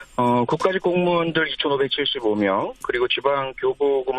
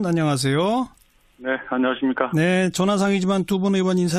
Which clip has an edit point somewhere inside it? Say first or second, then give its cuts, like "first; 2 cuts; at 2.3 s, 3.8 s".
first; 1 cut; at 2.3 s